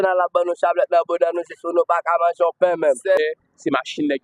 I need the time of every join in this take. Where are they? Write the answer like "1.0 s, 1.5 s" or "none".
3.2 s